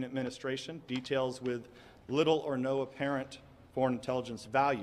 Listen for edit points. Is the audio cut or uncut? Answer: uncut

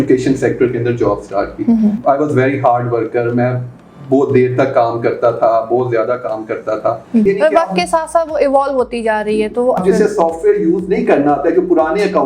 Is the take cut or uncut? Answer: cut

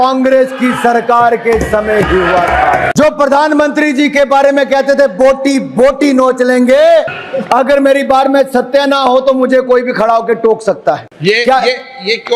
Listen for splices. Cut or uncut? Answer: cut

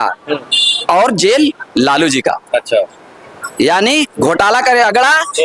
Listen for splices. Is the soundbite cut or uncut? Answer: uncut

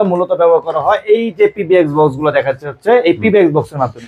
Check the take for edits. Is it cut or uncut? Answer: uncut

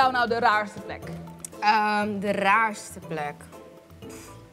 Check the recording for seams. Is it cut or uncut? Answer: uncut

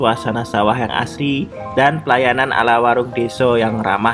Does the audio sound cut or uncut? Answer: uncut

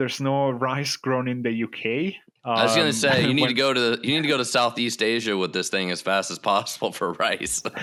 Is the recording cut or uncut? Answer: uncut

